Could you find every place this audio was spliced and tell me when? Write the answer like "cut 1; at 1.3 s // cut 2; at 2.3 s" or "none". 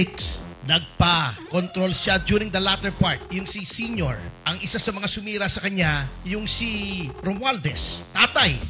none